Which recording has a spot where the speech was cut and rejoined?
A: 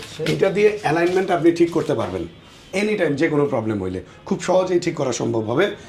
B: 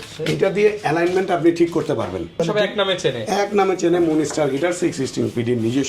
B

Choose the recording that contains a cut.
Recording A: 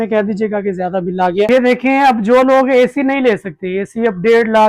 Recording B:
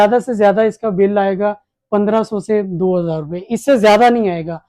A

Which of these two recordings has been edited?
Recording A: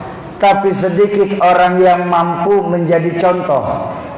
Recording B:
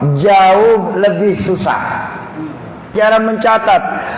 B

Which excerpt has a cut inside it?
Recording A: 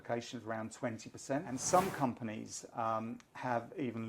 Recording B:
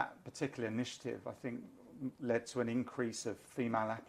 A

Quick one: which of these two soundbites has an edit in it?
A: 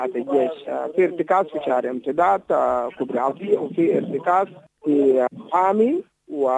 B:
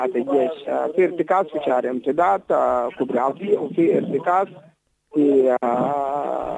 A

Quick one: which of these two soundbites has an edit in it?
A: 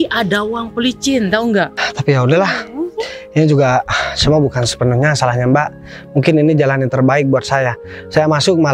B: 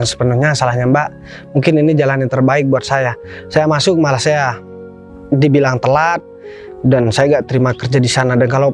A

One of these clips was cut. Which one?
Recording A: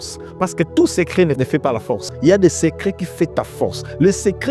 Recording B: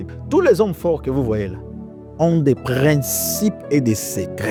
A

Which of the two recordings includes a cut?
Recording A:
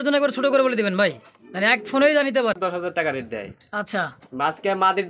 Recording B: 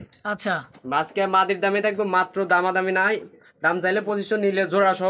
A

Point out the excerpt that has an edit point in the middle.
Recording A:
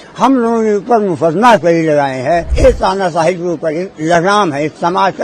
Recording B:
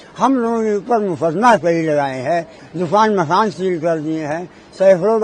A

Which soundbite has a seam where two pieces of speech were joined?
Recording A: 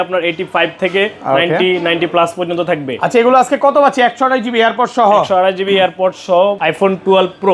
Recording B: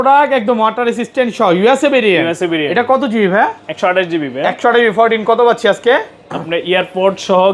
A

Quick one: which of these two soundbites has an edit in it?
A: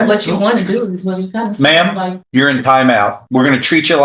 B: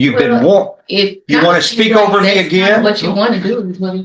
A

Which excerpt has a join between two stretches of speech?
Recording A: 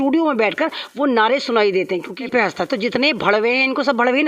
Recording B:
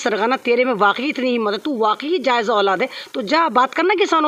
A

